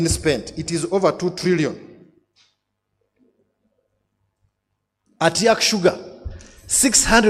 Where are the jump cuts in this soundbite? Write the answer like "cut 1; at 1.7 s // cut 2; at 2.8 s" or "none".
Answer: none

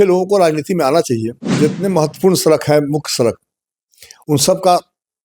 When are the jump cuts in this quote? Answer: cut 1; at 1.5 s

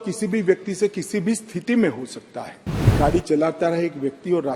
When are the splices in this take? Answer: cut 1; at 2.9 s

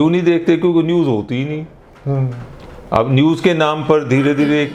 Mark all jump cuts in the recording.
none

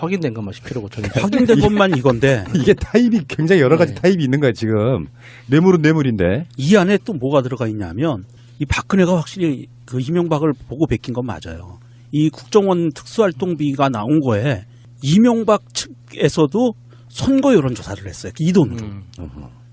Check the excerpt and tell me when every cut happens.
cut 1; at 17.6 s

